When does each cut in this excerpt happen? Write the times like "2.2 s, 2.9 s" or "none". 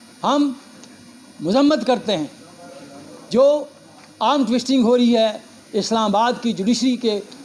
none